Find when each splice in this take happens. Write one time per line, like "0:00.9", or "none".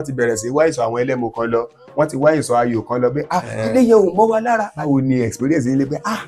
0:04.7